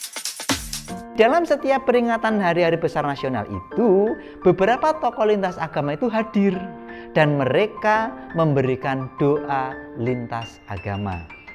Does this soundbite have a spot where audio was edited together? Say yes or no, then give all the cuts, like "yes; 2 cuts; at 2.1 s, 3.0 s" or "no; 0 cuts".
yes; 1 cut; at 1.1 s